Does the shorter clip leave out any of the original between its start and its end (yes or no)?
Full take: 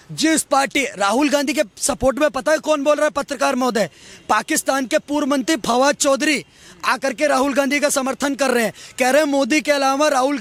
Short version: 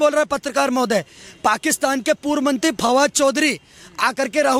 no